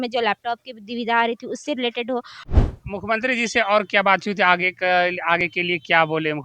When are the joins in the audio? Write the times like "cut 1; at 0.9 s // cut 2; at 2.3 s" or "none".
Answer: cut 1; at 2.4 s